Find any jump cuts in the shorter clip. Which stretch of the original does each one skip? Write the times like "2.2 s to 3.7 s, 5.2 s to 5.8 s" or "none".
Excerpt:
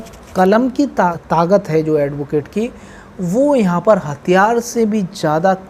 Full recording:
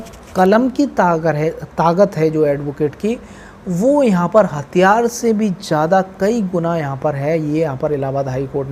1.2 s to 1.6 s